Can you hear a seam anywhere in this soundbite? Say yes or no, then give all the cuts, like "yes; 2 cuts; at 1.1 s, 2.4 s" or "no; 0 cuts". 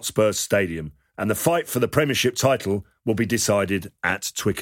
no; 0 cuts